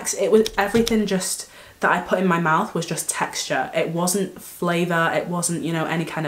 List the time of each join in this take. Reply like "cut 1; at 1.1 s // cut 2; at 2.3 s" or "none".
none